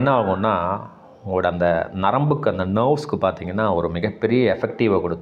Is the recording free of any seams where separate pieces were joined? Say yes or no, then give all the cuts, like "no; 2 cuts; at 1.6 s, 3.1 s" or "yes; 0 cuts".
yes; 0 cuts